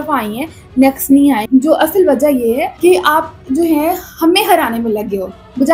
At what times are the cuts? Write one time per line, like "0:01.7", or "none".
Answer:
0:01.4